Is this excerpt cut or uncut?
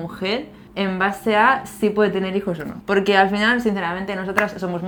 uncut